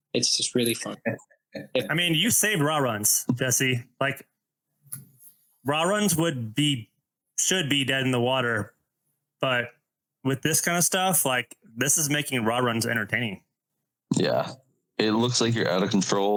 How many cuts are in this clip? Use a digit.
0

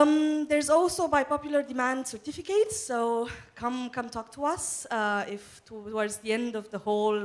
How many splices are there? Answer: 1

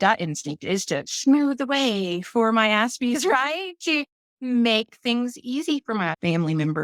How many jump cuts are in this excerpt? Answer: 0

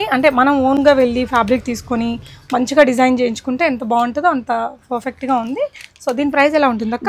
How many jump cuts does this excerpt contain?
0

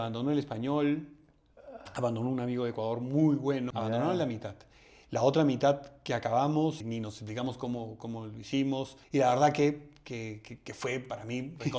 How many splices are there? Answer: 3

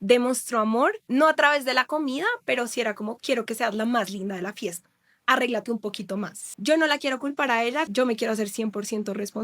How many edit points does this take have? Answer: 3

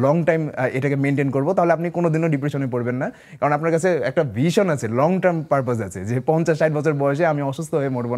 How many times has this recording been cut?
0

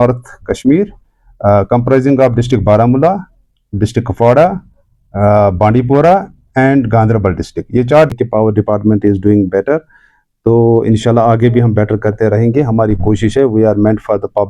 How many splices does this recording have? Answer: 1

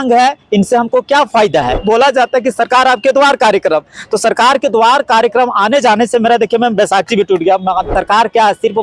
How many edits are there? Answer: 2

